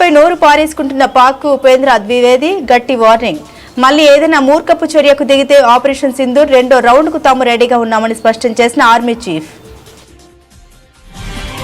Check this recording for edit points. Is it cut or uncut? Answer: cut